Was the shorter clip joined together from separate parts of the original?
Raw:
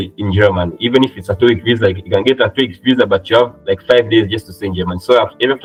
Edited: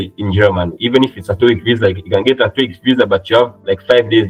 no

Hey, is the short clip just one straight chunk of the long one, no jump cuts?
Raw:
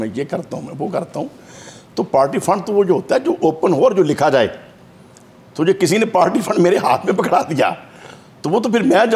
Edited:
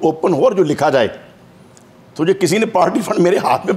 yes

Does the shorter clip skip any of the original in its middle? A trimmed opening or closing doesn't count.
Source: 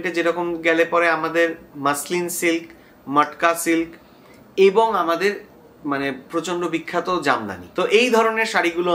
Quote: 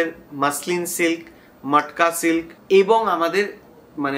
yes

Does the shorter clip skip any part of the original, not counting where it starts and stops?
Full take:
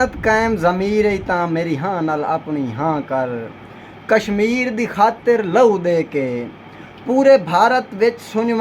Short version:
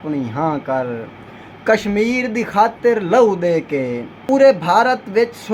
yes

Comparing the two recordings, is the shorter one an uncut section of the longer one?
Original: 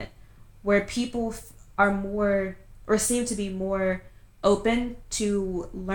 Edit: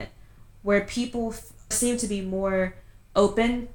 no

